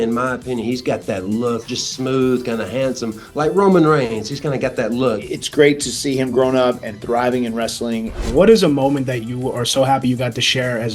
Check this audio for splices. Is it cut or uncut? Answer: cut